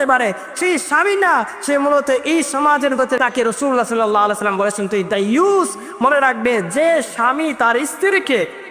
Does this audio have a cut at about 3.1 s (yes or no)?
yes